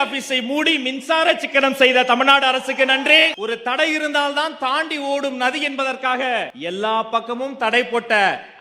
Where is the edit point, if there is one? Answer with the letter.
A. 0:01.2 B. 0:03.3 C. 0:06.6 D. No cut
B